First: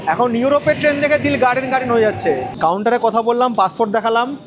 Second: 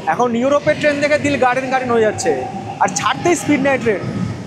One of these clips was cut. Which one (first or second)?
first